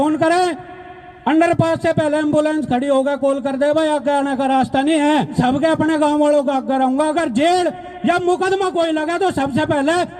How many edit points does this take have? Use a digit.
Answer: 1